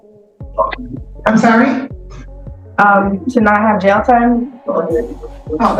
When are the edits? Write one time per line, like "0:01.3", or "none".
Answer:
none